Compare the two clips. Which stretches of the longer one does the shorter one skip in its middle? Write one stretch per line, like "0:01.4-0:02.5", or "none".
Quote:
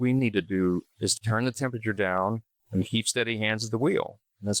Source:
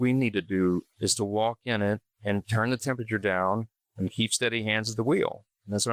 0:01.2-0:02.4

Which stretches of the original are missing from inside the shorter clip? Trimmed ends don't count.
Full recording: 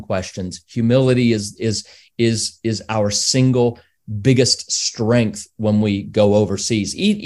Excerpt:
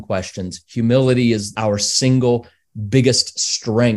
0:01.5-0:02.8

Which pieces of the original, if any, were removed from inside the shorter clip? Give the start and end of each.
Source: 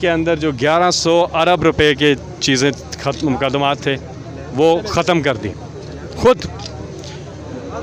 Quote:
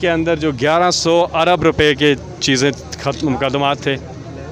none

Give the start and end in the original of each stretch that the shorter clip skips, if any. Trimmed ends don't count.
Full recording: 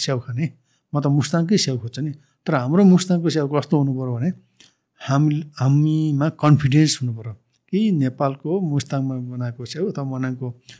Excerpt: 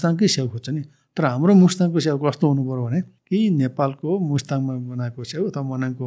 0:04.5-0:07.6

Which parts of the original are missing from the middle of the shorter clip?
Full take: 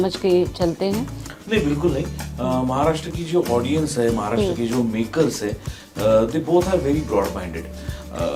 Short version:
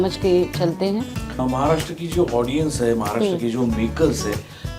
0:01.4-0:02.6

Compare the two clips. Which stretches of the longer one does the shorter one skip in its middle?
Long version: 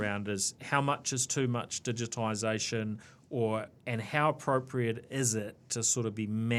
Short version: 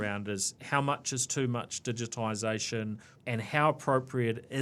0:03.2-0:03.8

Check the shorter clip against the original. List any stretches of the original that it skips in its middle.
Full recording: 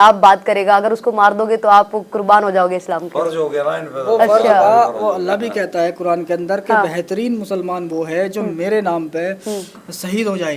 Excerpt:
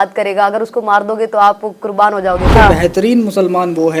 0:02.8-0:06.6

